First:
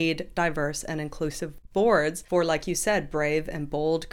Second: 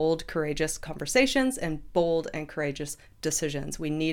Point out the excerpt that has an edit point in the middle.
first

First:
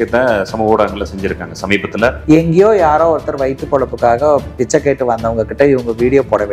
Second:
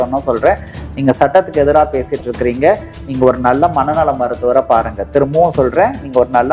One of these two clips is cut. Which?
first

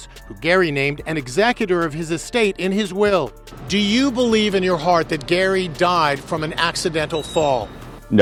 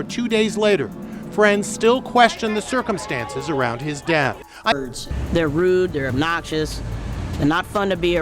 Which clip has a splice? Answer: second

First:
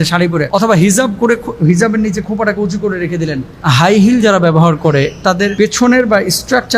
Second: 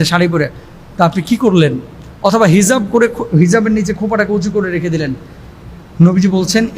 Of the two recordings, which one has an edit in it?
first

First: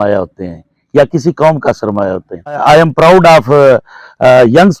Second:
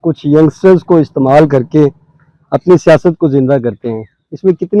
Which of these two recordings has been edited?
first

